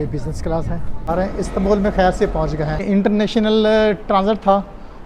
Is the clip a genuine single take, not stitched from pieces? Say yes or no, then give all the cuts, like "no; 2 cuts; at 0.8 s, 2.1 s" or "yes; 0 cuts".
no; 2 cuts; at 1.1 s, 2.8 s